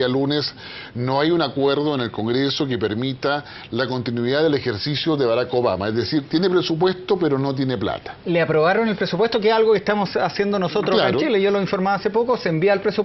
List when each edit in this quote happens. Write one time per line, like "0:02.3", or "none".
0:02.6